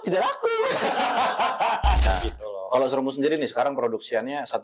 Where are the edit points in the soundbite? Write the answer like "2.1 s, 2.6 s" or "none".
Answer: 2.1 s